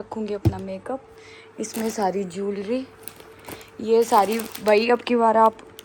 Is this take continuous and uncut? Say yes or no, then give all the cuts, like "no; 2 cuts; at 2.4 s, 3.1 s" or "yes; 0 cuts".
yes; 0 cuts